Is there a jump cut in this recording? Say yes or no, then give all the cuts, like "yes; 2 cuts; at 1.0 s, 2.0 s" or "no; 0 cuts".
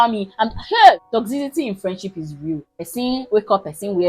yes; 2 cuts; at 1.0 s, 2.7 s